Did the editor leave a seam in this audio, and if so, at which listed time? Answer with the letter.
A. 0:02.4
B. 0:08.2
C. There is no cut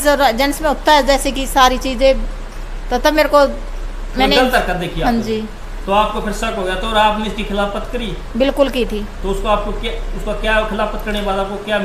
C